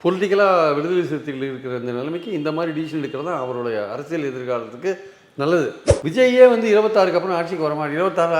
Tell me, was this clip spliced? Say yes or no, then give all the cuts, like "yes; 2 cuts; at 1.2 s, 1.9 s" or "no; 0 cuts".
yes; 1 cut; at 5.9 s